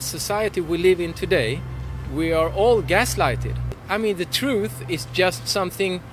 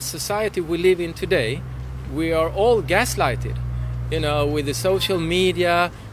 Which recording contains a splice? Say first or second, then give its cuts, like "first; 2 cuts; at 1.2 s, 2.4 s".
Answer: first; 1 cut; at 3.8 s